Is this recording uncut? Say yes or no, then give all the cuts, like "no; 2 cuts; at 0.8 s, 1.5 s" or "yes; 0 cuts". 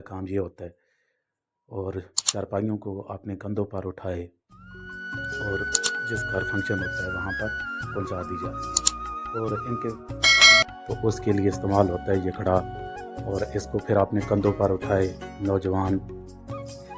no; 1 cut; at 10.6 s